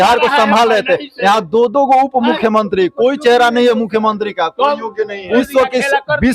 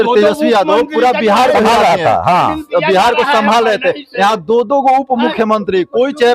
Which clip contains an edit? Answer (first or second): first